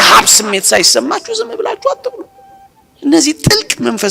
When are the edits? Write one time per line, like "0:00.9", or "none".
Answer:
none